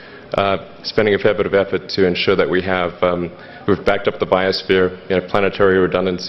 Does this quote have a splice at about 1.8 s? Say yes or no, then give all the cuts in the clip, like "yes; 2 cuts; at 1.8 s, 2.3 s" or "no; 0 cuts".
no; 0 cuts